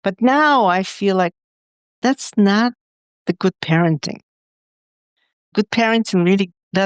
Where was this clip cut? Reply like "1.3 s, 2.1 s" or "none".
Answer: 5.5 s